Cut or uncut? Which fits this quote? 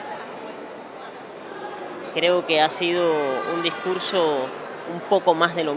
cut